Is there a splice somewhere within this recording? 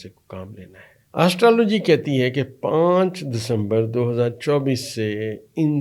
yes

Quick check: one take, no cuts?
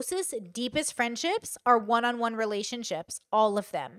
yes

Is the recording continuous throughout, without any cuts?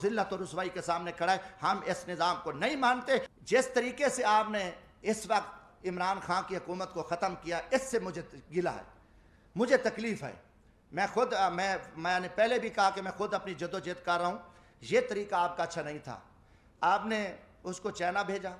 yes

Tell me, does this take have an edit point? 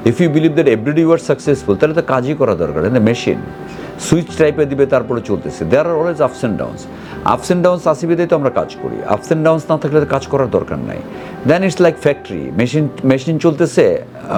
no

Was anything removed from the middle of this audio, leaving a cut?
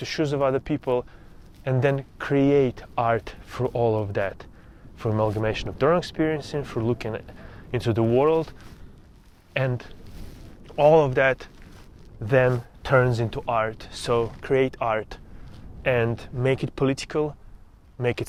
no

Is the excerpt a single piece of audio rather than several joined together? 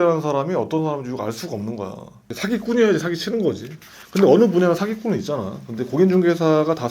no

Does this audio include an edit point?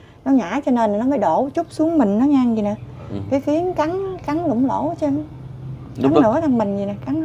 no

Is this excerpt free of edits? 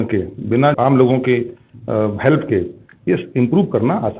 yes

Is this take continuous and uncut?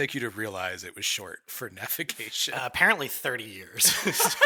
yes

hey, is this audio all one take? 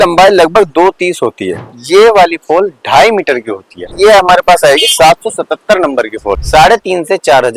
no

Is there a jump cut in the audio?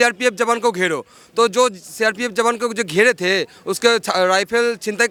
no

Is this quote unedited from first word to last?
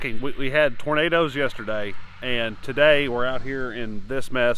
yes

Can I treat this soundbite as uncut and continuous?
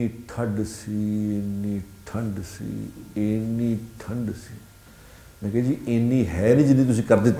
yes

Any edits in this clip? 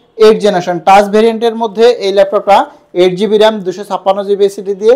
no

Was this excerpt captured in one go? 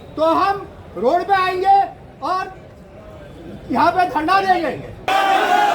yes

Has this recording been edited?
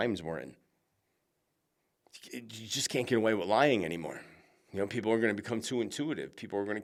no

